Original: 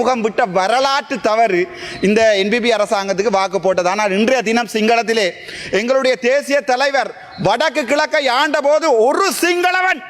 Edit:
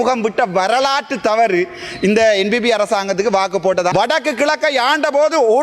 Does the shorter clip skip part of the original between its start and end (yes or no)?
yes